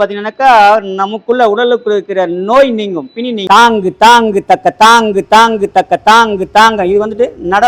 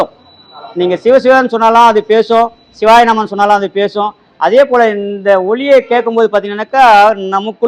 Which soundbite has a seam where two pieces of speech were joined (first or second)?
first